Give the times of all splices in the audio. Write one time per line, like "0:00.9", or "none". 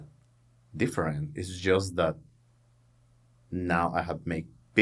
none